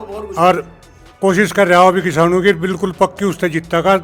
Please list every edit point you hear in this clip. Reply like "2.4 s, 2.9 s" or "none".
none